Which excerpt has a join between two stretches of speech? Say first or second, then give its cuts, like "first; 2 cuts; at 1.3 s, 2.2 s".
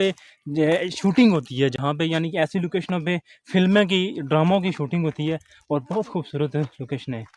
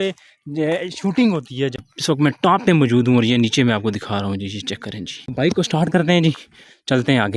second; 2 cuts; at 1.9 s, 5.2 s